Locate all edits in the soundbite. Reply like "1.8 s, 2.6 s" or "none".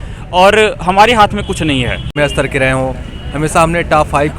2.1 s